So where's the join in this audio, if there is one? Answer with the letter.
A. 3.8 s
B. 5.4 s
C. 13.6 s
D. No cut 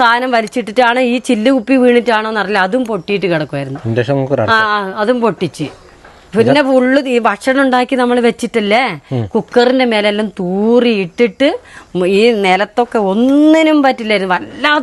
D